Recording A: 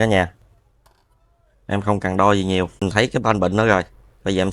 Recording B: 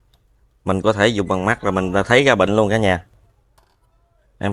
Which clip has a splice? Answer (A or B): A